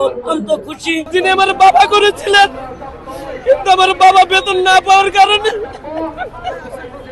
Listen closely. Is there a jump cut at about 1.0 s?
yes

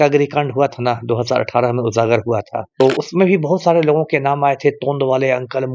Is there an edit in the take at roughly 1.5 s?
no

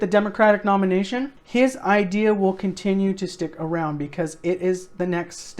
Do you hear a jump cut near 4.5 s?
no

